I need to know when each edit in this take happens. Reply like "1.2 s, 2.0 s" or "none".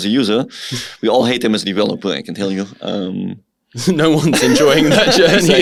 none